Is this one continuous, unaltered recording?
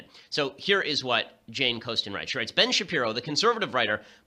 no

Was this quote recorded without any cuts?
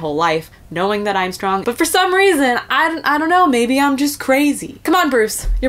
no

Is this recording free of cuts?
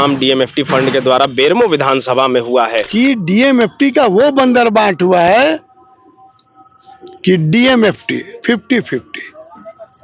no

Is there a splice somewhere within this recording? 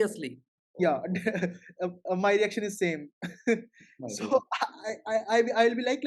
no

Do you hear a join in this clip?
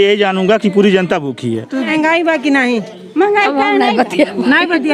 yes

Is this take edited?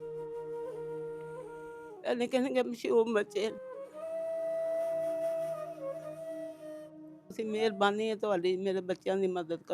yes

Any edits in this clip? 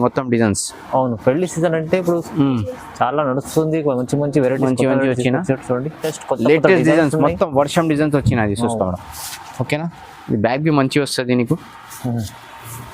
yes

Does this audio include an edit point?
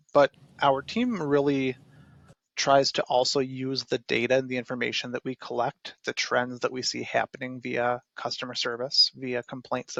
no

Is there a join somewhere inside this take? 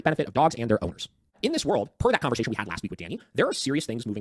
yes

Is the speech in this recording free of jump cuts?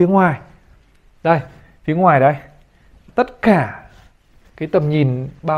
no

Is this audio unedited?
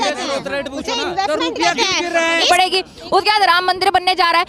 no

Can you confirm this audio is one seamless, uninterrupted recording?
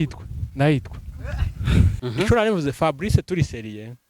no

